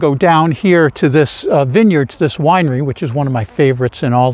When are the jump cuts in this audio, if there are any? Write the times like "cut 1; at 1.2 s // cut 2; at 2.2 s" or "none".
none

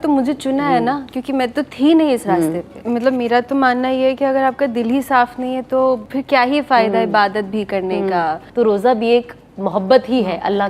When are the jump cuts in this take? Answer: cut 1; at 2.7 s // cut 2; at 6.1 s // cut 3; at 8.4 s

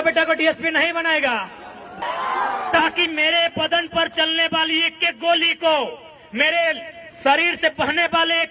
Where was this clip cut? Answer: cut 1; at 2.0 s

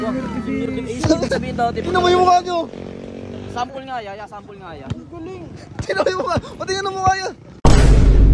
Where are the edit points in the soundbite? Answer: cut 1; at 7.3 s

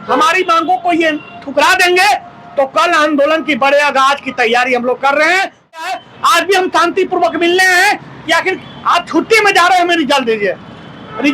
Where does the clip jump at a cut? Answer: cut 1; at 5.8 s

